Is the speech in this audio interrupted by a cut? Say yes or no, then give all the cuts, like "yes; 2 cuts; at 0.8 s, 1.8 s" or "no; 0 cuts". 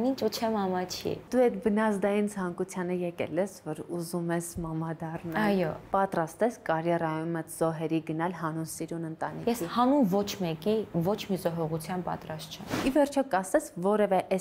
yes; 3 cuts; at 1.2 s, 5.9 s, 12.7 s